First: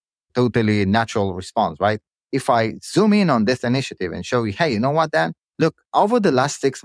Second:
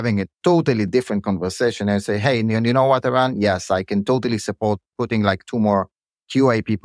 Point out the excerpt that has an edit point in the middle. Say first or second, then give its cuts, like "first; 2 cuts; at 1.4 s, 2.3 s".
first; 1 cut; at 5.8 s